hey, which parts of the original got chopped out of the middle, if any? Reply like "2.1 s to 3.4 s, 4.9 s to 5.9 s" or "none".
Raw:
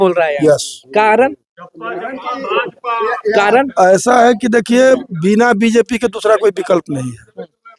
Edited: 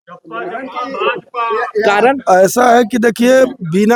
none

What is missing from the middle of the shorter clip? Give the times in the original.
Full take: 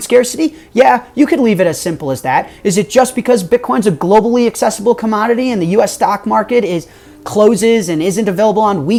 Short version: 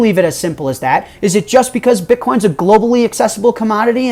none

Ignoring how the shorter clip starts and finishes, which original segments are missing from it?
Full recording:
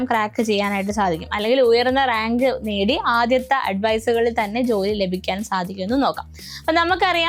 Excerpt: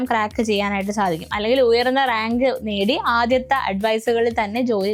none

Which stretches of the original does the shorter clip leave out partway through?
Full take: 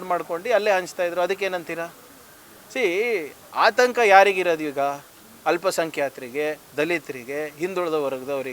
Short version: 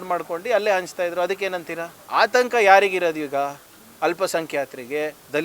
1.9 s to 3.4 s

